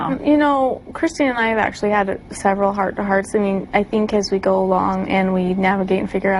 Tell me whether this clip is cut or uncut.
uncut